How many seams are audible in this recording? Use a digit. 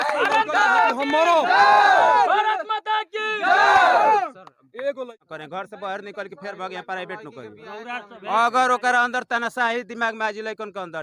1